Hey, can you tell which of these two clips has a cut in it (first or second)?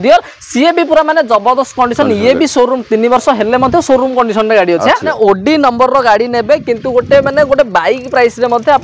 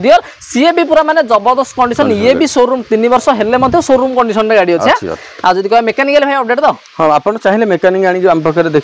first